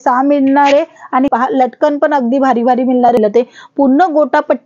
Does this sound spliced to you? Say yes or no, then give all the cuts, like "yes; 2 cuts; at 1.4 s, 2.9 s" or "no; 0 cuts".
yes; 2 cuts; at 1.3 s, 3.2 s